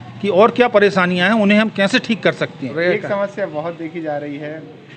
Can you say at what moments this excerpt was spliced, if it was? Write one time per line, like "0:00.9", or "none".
0:02.7